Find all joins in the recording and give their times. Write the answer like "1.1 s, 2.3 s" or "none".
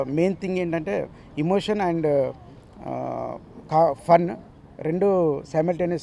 none

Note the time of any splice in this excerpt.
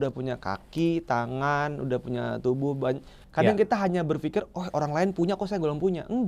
3.2 s

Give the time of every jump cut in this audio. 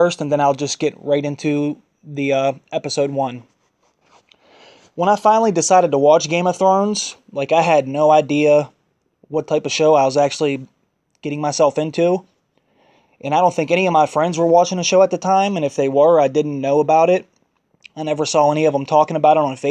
12.6 s

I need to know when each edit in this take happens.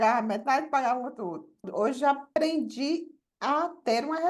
1.7 s, 2.3 s

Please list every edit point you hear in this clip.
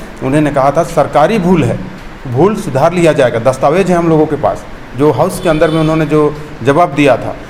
none

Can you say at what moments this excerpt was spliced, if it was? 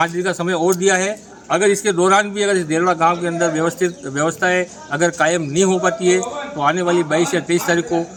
none

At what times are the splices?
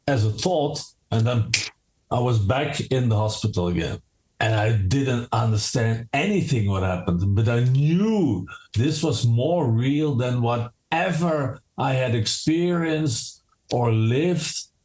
1.0 s

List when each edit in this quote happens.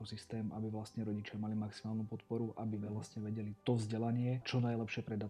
3.5 s, 4.4 s

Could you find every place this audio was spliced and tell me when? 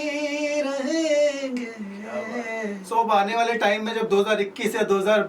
2.8 s

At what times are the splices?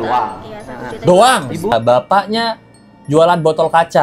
1.7 s

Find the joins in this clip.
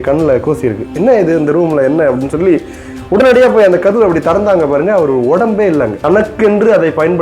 6.0 s

